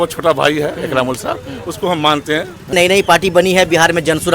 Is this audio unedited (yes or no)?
no